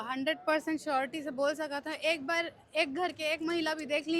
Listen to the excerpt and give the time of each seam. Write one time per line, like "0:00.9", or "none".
none